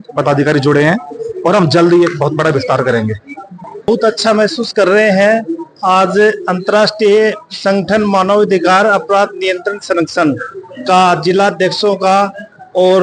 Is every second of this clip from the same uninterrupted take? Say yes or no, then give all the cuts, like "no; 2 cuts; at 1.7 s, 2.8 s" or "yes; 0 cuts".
yes; 0 cuts